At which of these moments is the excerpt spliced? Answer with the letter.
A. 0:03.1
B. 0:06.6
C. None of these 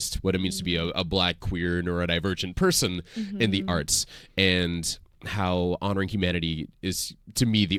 C